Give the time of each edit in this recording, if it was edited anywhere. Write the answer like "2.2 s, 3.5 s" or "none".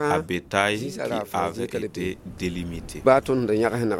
3.0 s